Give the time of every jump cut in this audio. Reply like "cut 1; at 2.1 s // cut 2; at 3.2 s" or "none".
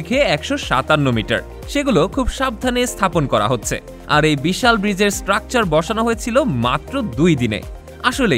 none

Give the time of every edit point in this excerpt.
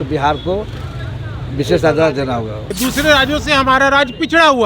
cut 1; at 2.7 s

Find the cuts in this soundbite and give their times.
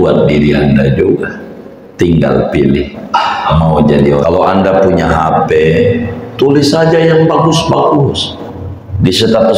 cut 1; at 4.2 s

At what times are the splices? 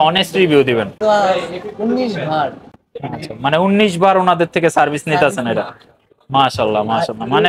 cut 1; at 0.9 s

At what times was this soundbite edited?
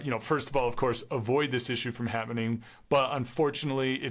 none

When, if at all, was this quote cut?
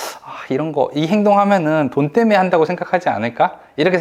none

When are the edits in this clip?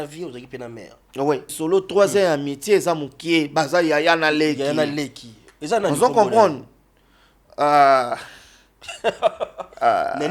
cut 1; at 1.5 s

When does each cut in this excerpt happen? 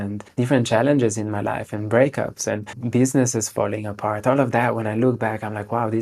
cut 1; at 2.8 s

